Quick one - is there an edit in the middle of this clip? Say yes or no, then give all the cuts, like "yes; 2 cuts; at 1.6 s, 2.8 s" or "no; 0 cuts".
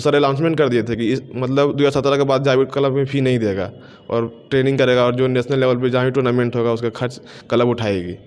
no; 0 cuts